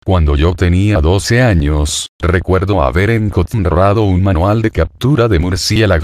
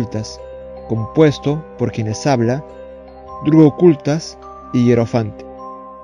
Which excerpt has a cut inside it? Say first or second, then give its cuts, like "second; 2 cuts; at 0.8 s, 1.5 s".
first; 1 cut; at 3.3 s